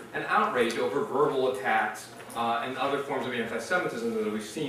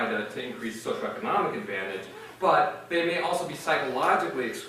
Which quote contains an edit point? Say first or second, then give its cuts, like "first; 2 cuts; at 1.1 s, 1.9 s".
second; 1 cut; at 1.1 s